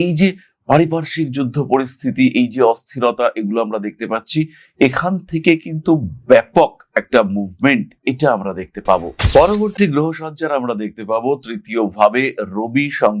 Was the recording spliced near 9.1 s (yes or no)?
yes